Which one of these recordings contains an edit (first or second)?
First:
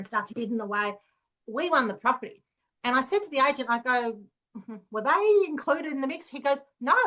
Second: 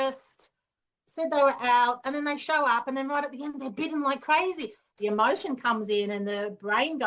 second